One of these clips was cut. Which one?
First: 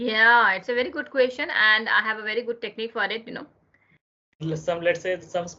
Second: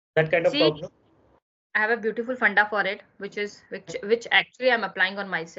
first; 1 cut; at 4.3 s

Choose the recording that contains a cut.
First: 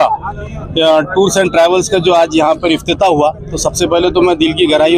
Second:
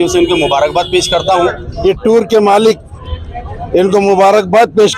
second; 1 cut; at 1.7 s

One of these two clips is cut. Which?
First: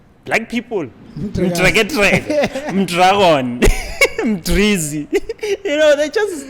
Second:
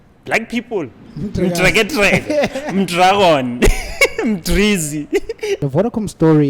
second; 1 cut; at 5.6 s

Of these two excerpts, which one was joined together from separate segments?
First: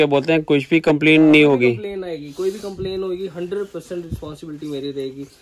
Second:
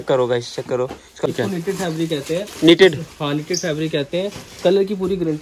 second; 1 cut; at 1.3 s

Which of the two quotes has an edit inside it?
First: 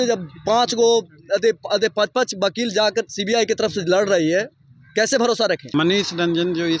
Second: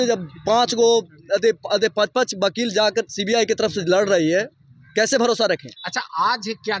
first; 1 cut; at 5.6 s

